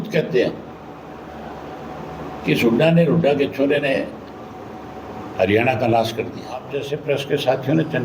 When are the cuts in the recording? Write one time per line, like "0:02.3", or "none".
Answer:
0:06.8